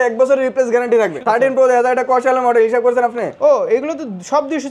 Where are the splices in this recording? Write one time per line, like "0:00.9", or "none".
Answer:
0:01.2